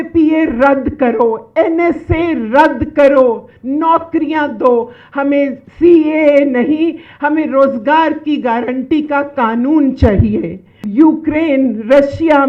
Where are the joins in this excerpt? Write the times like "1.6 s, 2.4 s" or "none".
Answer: 10.8 s